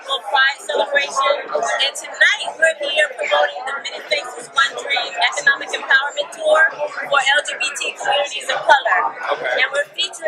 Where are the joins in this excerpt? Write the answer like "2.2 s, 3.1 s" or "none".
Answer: 1.3 s